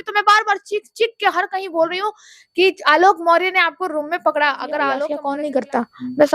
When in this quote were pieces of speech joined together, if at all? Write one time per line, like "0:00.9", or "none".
0:05.2